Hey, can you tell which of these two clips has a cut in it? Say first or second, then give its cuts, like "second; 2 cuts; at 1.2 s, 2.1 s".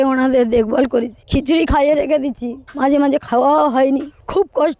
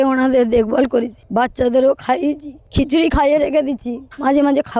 first; 1 cut; at 1.2 s